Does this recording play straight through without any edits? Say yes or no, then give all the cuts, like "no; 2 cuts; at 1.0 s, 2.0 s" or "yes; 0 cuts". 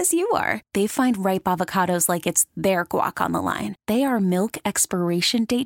yes; 0 cuts